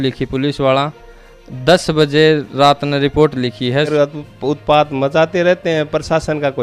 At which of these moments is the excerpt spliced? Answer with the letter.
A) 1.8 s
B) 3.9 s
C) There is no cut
B